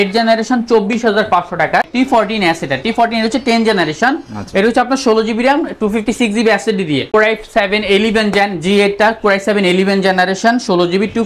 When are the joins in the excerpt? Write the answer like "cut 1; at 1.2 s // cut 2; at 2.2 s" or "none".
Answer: cut 1; at 1.9 s // cut 2; at 7.1 s